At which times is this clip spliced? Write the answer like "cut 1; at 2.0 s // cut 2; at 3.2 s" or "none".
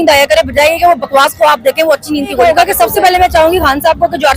cut 1; at 2.4 s